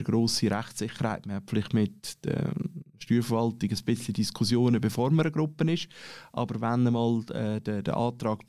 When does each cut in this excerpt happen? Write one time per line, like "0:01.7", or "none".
none